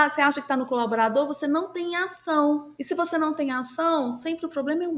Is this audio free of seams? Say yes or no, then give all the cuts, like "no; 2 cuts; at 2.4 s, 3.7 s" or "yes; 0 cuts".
no; 1 cut; at 2.7 s